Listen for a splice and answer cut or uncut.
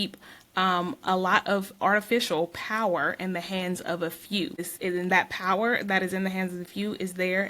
cut